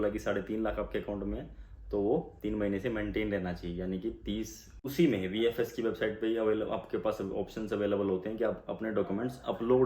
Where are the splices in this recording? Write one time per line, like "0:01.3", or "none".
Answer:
0:04.9